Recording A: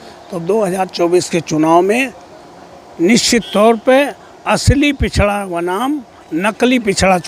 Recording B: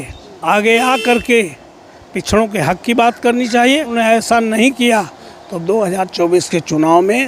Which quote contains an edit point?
B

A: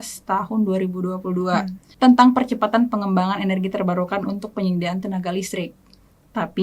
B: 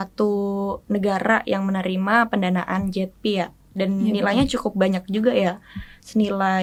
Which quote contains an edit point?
A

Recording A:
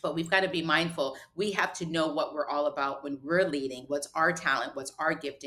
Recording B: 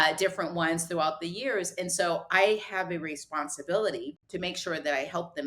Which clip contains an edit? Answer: B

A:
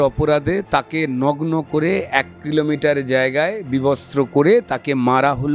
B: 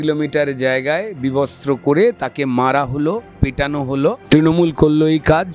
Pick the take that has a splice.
B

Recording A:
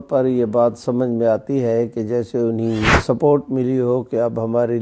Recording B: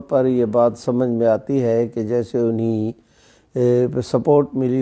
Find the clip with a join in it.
A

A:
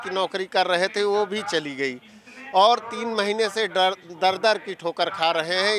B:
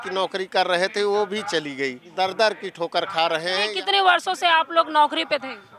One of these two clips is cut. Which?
B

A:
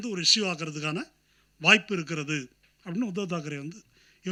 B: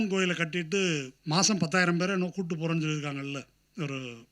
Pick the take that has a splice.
B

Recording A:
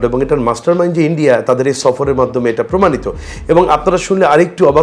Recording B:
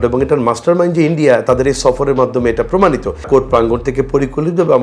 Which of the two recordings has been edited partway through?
B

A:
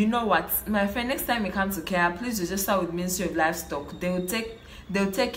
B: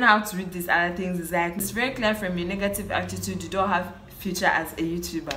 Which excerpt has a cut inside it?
B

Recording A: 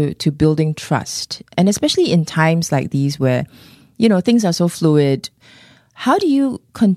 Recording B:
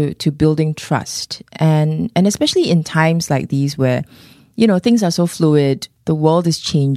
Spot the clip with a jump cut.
A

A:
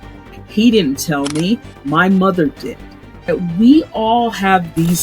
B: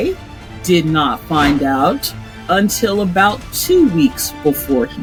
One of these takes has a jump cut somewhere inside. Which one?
A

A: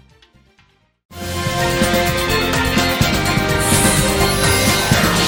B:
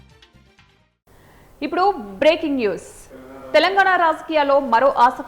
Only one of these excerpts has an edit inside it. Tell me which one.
B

